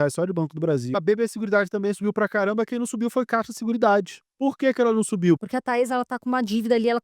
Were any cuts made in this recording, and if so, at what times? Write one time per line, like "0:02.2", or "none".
0:00.9
0:04.2
0:05.4